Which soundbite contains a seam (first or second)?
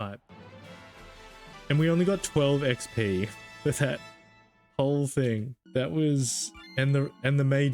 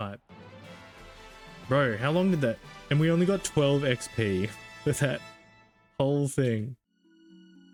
first